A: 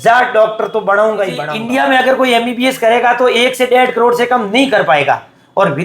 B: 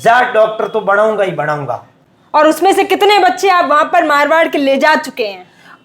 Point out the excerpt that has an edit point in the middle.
A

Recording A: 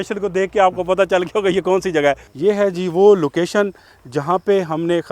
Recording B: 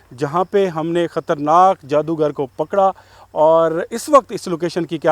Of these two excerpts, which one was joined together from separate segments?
A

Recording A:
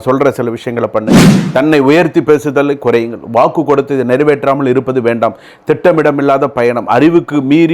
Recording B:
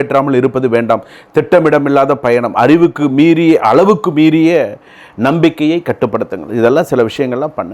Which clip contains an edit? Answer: A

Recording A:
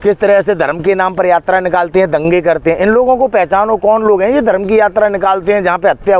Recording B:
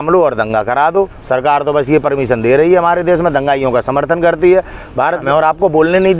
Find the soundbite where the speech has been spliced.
B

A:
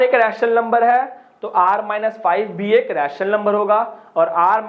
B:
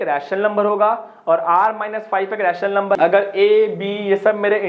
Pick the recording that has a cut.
B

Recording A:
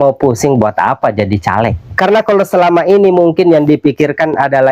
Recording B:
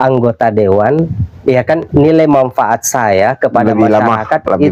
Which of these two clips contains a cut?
A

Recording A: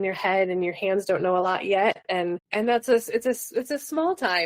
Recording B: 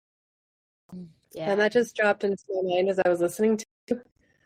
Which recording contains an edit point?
A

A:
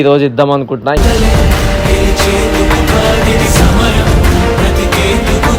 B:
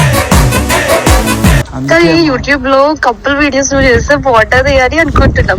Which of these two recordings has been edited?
B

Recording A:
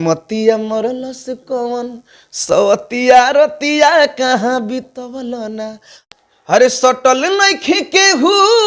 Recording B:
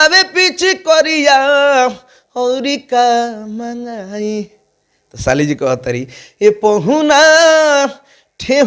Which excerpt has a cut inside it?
A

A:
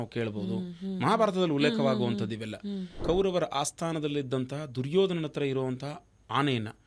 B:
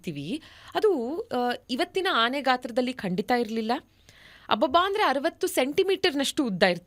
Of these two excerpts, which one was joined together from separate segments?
A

